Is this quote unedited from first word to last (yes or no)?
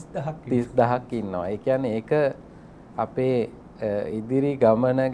yes